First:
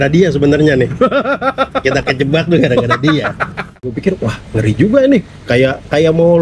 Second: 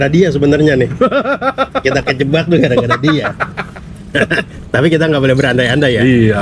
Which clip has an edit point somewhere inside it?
first; 1 cut; at 4.0 s

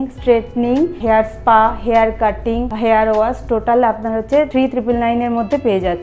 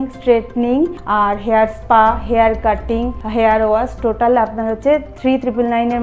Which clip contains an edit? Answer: first; 3 cuts; at 1.0 s, 2.7 s, 4.5 s

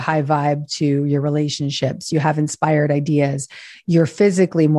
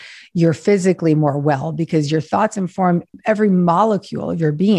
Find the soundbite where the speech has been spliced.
second; 1 cut; at 3.1 s

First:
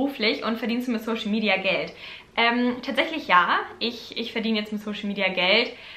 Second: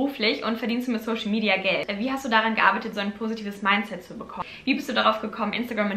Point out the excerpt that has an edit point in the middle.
second; 2 cuts; at 1.9 s, 4.5 s

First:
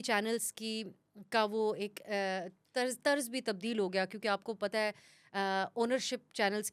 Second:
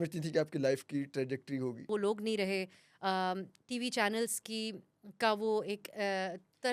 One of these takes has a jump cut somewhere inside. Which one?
second; 1 cut; at 1.9 s

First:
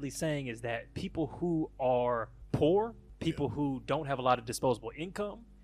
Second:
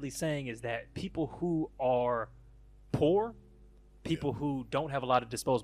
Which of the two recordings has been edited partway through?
first; 2 cuts; at 2.4 s, 3.0 s

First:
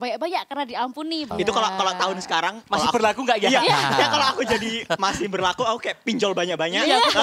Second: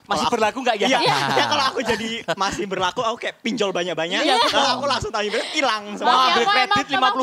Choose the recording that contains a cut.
first; 1 cut; at 1.3 s

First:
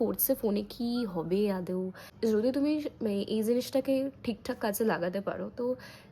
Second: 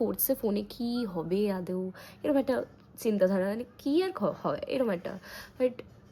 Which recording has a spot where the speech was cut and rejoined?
first; 1 cut; at 2.0 s

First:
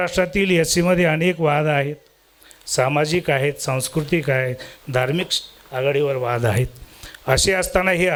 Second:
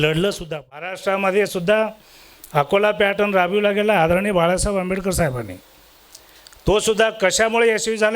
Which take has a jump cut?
second; 1 cut; at 0.9 s

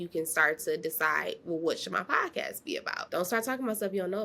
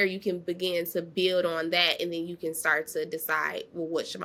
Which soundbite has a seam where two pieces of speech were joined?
first; 1 cut; at 3.0 s

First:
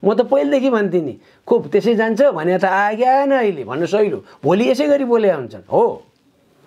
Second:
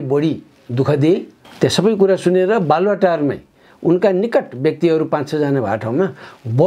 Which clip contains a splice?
second; 1 cut; at 1.4 s

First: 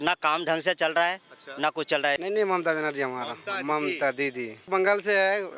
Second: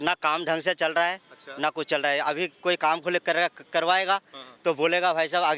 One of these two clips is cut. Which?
first; 2 cuts; at 2.2 s, 4.7 s

